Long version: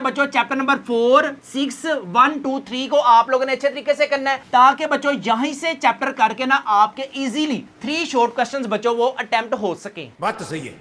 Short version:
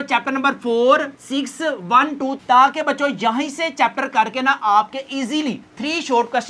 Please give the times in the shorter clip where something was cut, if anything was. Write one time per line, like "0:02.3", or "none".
0:02.4